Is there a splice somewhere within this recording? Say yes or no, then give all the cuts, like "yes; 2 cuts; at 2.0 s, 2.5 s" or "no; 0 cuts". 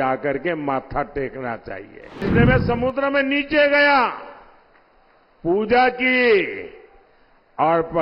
yes; 1 cut; at 2.2 s